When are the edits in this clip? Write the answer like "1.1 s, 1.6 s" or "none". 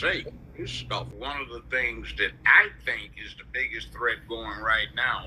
1.1 s